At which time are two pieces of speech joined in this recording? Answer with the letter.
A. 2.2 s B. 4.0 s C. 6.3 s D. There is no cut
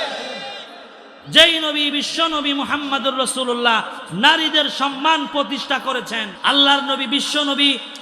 C